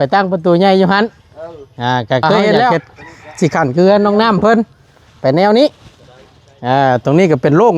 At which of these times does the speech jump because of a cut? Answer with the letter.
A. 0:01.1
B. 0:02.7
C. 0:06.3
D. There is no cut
B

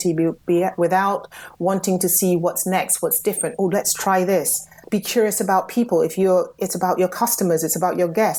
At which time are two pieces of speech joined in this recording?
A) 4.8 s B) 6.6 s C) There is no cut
A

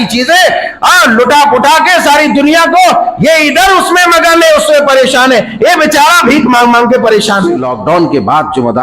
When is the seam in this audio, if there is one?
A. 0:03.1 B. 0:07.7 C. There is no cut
B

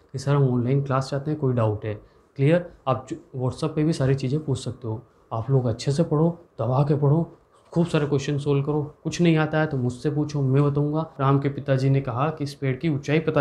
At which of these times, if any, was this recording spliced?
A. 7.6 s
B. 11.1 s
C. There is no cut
B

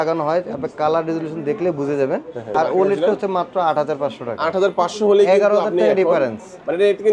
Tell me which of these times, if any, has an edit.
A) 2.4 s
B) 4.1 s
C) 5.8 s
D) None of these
A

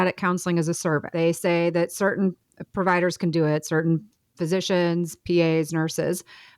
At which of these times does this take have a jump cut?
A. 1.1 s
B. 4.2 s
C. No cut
A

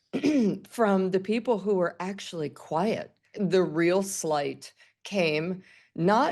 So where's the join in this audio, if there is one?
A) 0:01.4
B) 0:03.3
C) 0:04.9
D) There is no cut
B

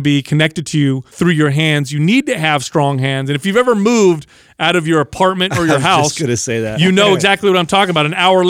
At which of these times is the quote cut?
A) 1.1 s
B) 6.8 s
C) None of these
A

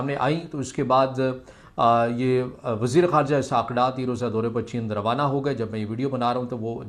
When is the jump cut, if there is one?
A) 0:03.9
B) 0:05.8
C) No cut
C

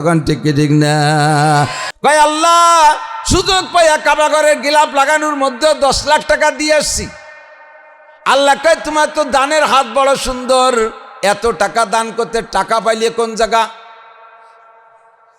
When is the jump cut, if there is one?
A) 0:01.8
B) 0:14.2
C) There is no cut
A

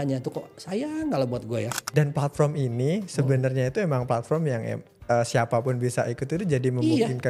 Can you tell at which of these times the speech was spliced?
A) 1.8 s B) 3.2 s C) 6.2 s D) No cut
A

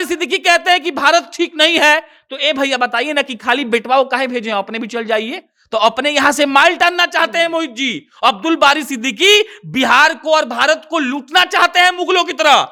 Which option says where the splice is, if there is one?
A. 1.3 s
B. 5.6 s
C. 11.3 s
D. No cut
D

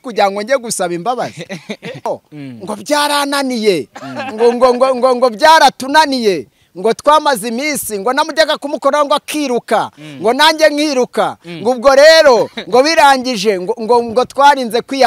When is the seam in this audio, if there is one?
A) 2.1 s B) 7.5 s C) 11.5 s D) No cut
A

